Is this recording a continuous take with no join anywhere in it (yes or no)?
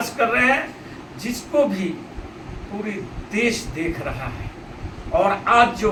yes